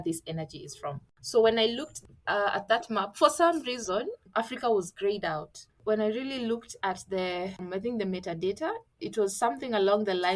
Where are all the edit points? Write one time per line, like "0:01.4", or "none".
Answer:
0:01.1
0:04.2
0:05.8
0:07.6
0:09.0